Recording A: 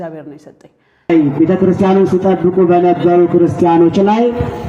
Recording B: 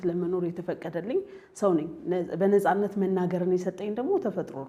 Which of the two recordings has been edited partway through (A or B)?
A